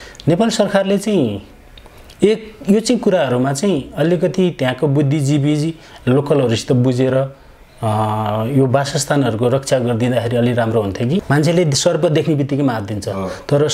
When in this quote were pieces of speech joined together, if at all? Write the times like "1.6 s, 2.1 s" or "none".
11.2 s

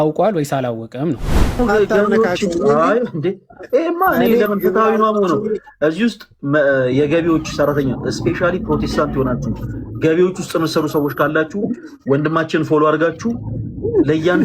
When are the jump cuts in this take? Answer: 1.4 s

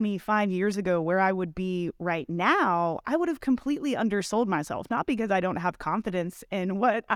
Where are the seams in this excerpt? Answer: none

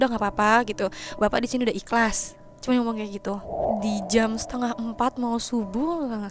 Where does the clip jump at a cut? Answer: 3.6 s

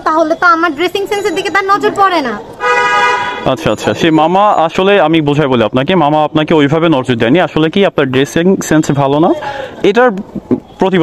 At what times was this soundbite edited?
none

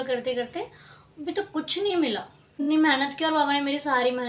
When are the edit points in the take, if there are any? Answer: 2.6 s

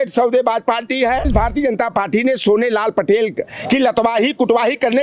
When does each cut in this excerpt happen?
1.3 s

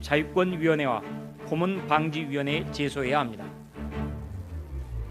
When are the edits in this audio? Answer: 3.0 s

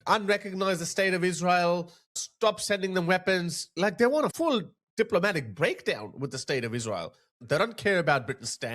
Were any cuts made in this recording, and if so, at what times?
3.8 s, 7.3 s

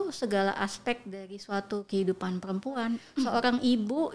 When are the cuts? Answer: 3.0 s

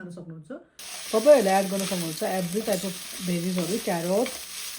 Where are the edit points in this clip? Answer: 0.9 s

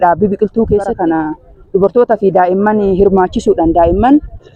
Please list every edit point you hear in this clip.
none

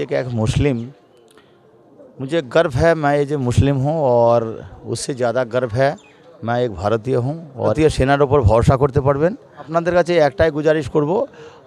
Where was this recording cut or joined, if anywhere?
7.7 s, 9.7 s

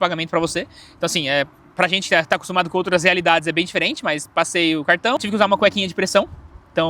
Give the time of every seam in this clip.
5.2 s

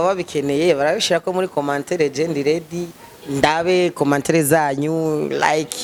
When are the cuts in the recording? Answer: none

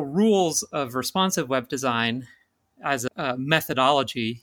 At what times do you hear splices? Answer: 3.1 s

